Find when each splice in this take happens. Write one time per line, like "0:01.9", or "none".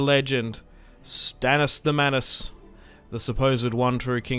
none